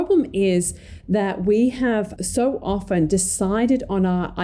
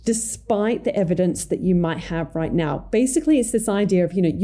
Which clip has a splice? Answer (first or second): first